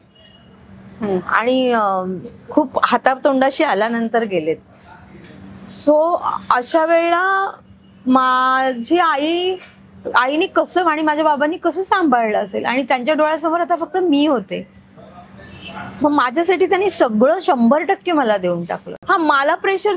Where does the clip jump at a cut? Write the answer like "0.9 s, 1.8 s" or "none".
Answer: 18.9 s